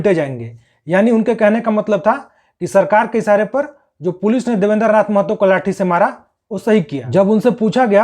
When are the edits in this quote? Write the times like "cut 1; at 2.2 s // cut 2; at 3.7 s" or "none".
cut 1; at 7.0 s